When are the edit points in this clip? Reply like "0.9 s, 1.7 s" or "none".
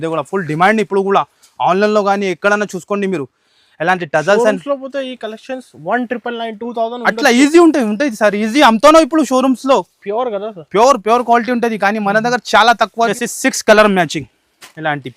13.1 s

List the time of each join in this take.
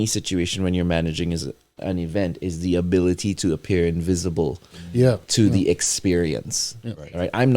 1.7 s

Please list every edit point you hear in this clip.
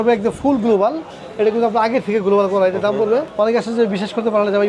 3.3 s

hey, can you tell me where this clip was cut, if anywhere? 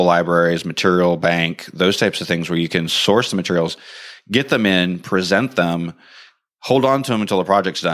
none

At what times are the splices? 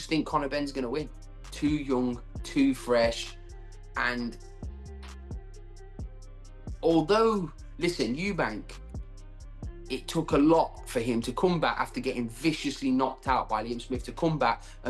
none

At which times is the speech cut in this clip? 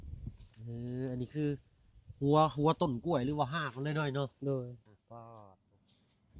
5.4 s

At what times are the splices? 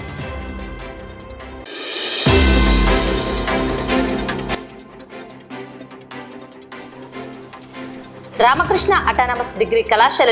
1.7 s, 8.0 s

